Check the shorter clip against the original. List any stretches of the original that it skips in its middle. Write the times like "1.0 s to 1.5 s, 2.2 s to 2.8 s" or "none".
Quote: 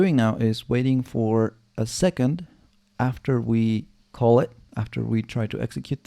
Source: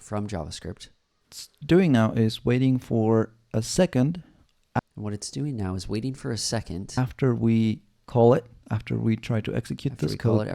4.8 s to 7.0 s